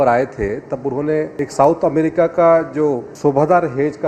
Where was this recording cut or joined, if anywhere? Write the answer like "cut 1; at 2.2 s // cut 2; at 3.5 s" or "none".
cut 1; at 1.3 s // cut 2; at 3.1 s

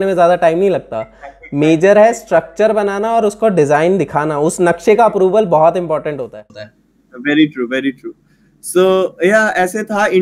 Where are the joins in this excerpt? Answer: none

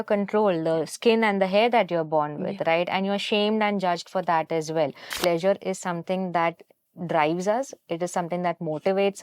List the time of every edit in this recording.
cut 1; at 5.1 s

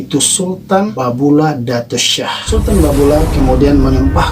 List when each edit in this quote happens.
cut 1; at 0.9 s // cut 2; at 2.4 s

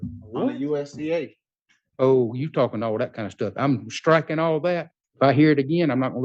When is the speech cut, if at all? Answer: cut 1; at 5.0 s

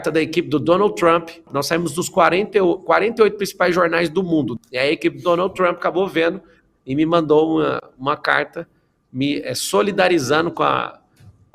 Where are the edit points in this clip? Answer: cut 1; at 1.5 s // cut 2; at 4.5 s

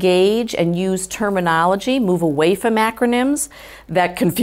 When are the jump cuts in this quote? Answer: none

